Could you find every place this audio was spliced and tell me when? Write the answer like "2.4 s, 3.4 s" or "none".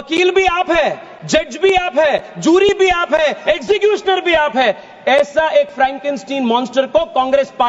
none

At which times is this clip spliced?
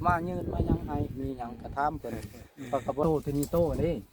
3.0 s

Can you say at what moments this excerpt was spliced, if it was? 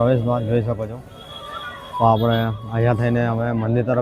none

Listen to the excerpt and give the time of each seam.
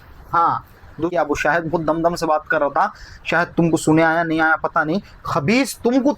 1.1 s

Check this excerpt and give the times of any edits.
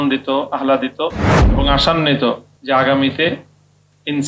2.5 s

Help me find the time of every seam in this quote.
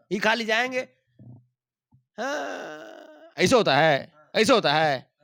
none

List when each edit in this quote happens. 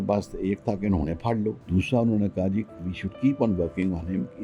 1.6 s

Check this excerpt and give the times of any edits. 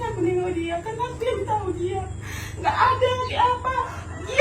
none

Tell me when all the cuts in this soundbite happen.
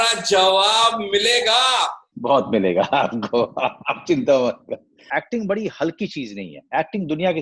2.1 s, 5.0 s

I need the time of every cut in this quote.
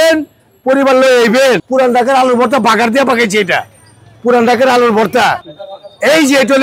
1.6 s, 5.3 s

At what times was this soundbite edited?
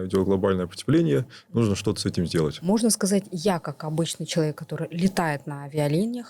2.6 s

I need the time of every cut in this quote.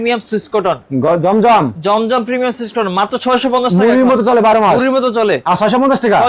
none

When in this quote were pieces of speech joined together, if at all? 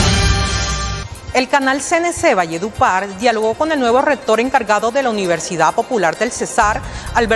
1.2 s

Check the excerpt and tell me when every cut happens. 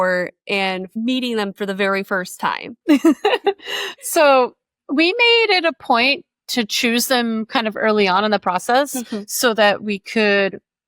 2.7 s

